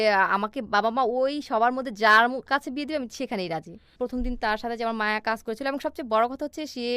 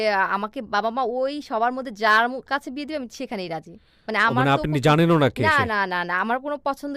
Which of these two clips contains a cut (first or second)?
first